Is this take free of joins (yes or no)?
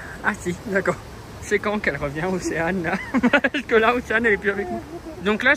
yes